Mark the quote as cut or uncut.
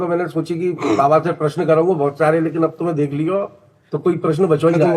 uncut